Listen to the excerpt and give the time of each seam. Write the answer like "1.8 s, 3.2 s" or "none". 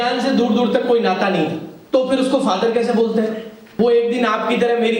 1.7 s, 3.6 s